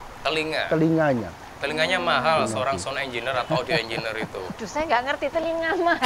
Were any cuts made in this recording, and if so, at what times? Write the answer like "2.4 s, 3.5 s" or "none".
none